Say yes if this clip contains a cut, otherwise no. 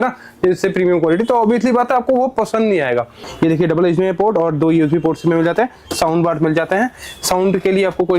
yes